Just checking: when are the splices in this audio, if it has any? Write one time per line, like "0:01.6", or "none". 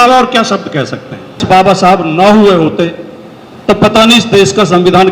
0:01.4

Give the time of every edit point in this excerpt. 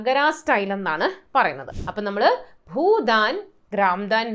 0:01.7

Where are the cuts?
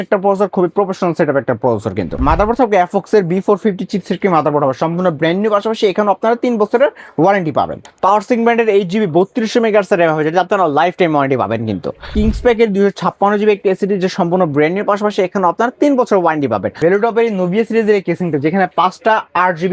0:02.2
0:07.8
0:12.1
0:16.8

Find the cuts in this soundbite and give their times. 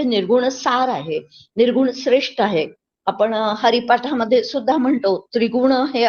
none

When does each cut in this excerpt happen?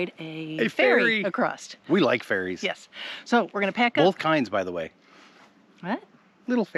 none

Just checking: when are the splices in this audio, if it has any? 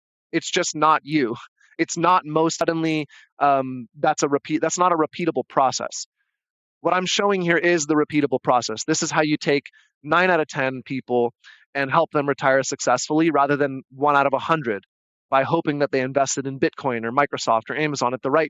0:02.6

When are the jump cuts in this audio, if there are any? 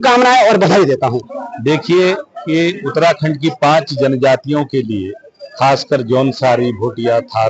0:01.2

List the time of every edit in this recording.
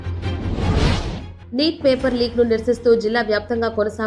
0:01.3

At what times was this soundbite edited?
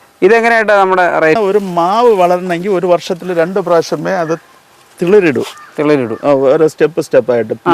0:01.4

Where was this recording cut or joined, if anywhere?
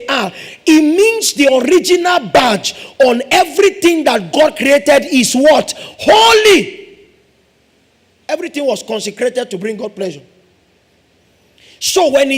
none

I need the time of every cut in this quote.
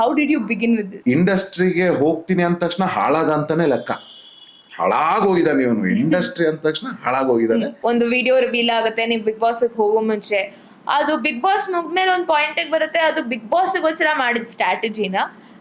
0:00.9
0:07.7

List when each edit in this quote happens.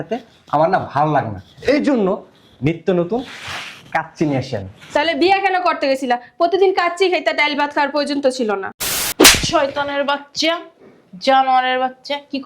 0:09.0

